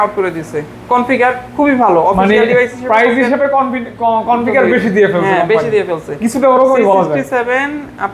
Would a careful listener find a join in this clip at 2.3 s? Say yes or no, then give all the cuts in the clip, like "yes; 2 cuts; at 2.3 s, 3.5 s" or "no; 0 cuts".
no; 0 cuts